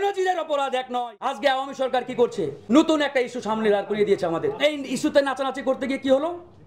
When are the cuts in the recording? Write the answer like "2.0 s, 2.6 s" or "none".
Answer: 1.3 s, 2.6 s, 4.6 s

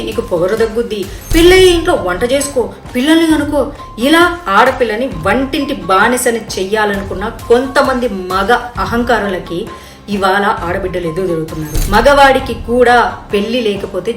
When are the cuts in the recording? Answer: 11.8 s

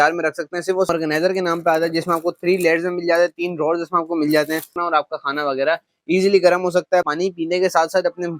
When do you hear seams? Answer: 0.9 s, 4.8 s, 7.1 s

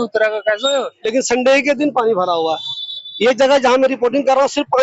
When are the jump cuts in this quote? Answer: 1.0 s

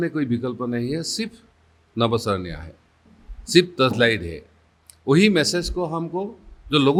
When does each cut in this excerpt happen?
none

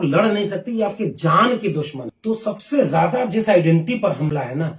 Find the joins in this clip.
2.0 s

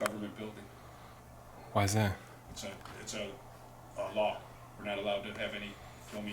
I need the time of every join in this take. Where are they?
1.2 s, 4.8 s

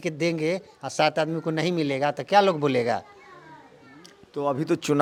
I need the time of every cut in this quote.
none

